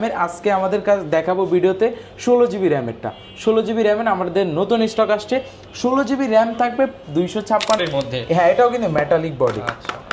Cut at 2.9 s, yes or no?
no